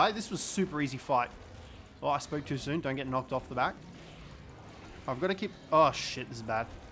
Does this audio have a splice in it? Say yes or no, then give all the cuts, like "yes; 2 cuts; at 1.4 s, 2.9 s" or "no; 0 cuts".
yes; 1 cut; at 3.9 s